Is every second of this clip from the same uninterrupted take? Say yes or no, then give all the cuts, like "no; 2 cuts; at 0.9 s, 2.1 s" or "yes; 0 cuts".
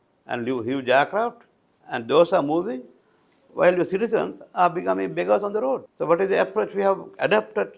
no; 1 cut; at 5.9 s